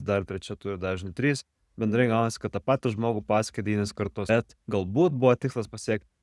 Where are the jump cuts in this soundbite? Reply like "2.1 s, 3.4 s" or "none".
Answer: 4.3 s